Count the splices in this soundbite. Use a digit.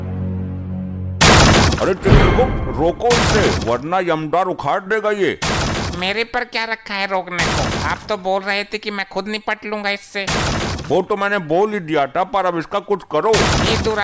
0